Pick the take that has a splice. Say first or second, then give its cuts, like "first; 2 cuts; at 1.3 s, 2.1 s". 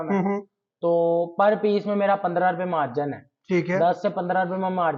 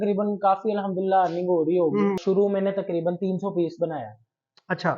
second; 1 cut; at 2.2 s